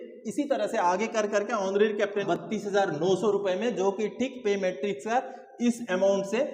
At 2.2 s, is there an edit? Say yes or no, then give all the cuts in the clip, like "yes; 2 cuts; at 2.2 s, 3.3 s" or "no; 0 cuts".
yes; 1 cut; at 2.2 s